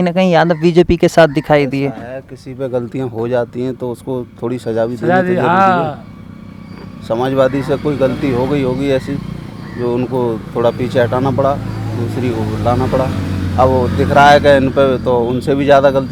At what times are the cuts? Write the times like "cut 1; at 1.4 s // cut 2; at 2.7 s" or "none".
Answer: none

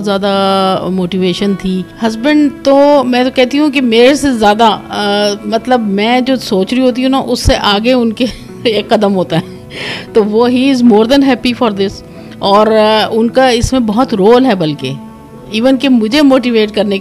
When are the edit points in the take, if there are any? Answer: cut 1; at 1.9 s

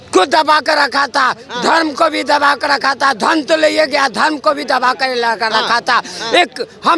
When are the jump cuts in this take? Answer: none

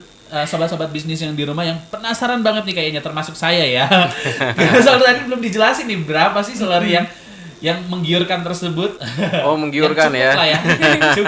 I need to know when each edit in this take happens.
none

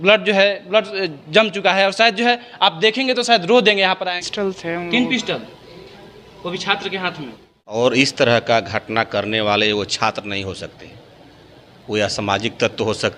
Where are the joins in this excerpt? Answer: cut 1; at 4.1 s // cut 2; at 7.5 s

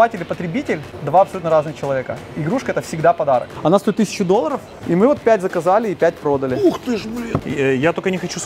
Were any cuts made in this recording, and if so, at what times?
cut 1; at 0.9 s // cut 2; at 3.5 s // cut 3; at 4.7 s // cut 4; at 7.4 s

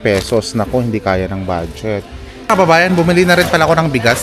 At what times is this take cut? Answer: cut 1; at 2.5 s

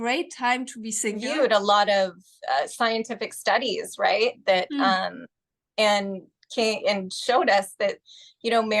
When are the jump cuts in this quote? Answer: cut 1; at 1.3 s

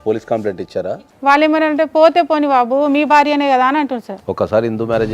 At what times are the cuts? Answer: cut 1; at 0.9 s // cut 2; at 4.1 s

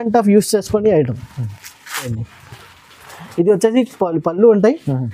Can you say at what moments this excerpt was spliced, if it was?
cut 1; at 2.1 s

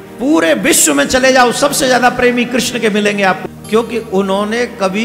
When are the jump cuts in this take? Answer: cut 1; at 3.5 s

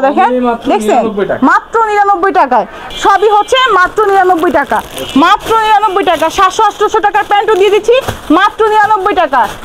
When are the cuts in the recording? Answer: cut 1; at 2.8 s

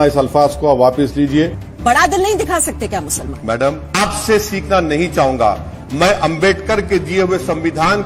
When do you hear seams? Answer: cut 1; at 1.6 s // cut 2; at 3.9 s

